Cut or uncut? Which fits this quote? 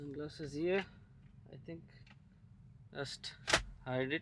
uncut